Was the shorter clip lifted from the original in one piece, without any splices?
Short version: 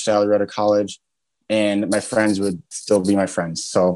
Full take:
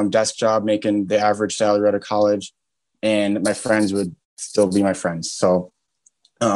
no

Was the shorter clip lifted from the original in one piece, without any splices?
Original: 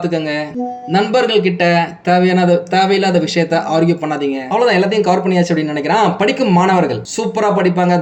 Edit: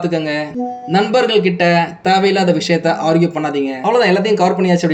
no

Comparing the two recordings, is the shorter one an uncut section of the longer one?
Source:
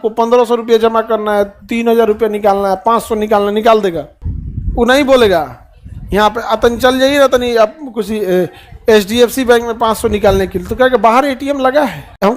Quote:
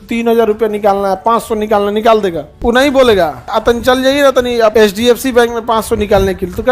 no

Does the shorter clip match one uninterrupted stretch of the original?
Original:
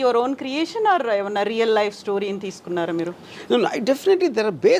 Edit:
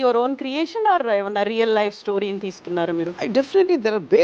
no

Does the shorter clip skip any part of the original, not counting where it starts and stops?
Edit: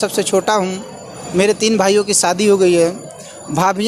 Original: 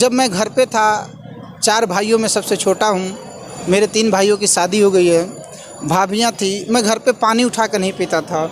no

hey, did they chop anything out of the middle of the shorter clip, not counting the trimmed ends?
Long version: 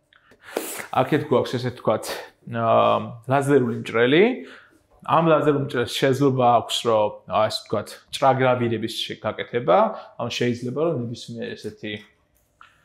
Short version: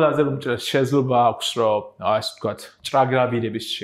no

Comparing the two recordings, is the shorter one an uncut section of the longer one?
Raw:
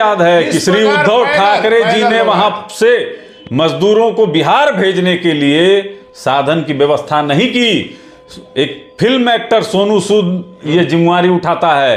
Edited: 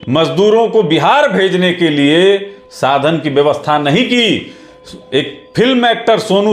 yes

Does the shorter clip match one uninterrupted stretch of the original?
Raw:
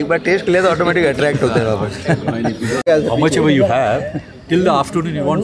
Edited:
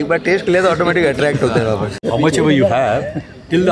no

